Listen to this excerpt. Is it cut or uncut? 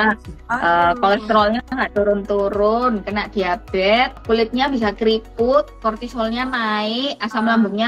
cut